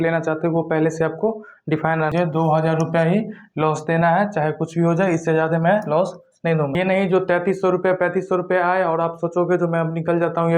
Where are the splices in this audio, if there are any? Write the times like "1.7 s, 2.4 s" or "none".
2.1 s, 6.7 s